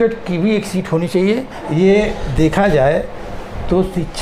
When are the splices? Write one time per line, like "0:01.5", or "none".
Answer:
0:01.6

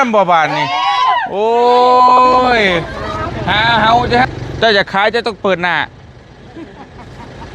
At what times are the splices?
0:04.2

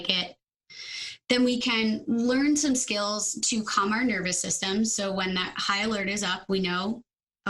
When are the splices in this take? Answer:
none

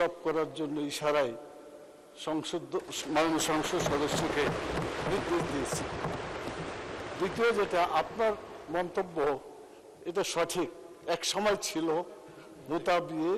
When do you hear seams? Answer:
none

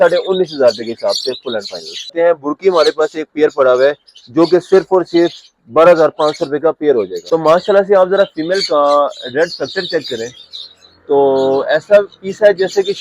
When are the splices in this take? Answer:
0:02.1
0:07.2

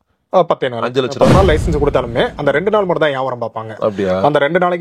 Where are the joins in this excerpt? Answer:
0:01.2

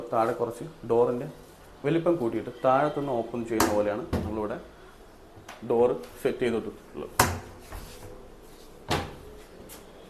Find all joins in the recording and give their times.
none

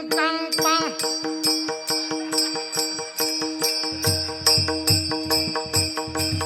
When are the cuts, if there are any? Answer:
none

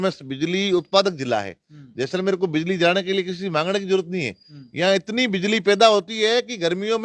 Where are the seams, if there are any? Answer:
none

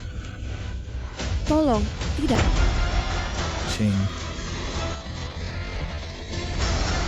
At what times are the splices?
0:02.4

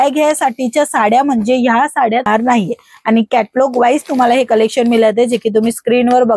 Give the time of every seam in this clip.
0:02.3

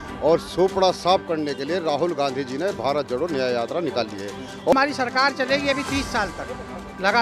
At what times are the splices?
0:04.7

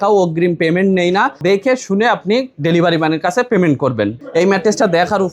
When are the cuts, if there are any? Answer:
0:01.4
0:04.2

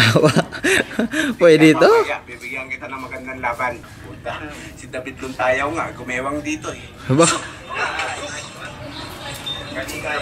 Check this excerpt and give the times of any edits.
0:03.9

